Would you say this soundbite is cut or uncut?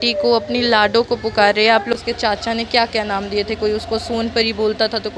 cut